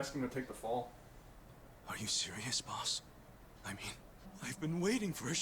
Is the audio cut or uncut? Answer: cut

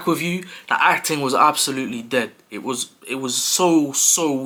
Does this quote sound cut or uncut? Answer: uncut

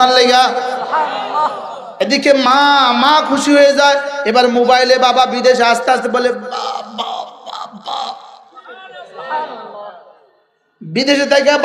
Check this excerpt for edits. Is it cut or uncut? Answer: cut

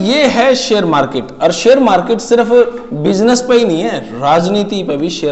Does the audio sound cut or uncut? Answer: uncut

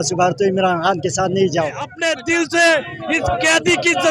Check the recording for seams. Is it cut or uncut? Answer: cut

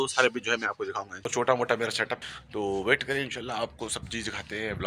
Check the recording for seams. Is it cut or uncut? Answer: cut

